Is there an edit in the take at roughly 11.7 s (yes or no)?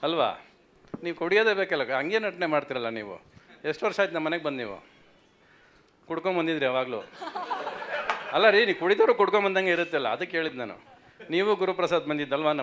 no